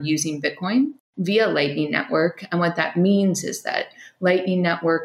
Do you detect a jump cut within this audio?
yes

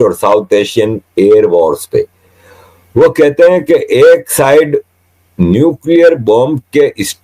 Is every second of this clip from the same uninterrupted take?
yes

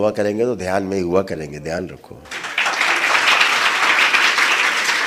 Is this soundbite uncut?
yes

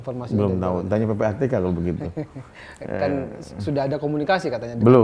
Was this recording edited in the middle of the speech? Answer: no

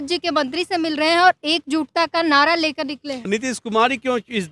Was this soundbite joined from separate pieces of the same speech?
yes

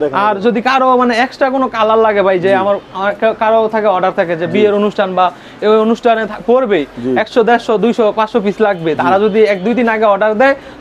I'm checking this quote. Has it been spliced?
no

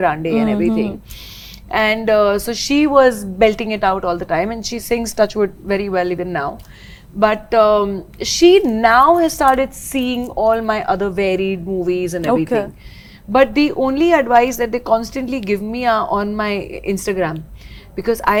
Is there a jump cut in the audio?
no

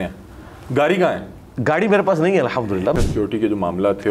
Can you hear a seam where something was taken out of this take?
yes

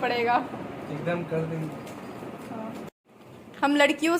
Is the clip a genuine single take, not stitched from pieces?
no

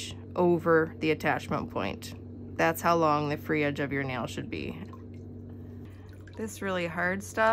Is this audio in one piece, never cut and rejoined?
no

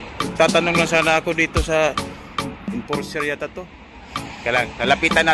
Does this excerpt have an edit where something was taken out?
yes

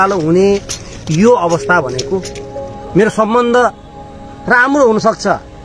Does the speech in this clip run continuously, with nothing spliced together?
no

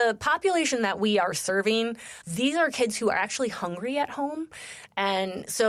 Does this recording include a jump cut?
no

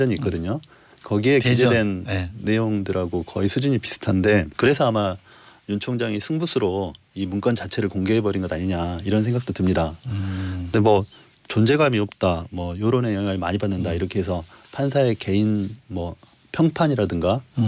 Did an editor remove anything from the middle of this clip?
yes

